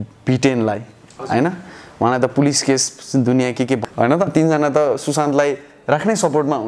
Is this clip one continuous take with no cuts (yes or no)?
no